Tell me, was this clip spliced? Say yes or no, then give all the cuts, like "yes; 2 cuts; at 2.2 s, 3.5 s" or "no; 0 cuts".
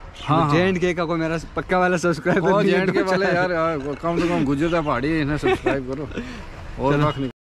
no; 0 cuts